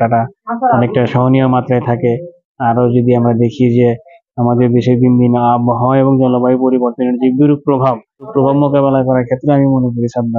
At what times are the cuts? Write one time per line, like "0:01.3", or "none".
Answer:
0:08.3